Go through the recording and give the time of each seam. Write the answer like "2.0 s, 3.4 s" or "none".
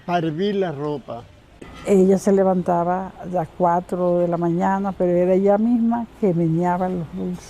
1.7 s